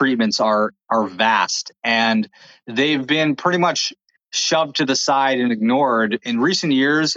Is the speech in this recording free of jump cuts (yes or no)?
no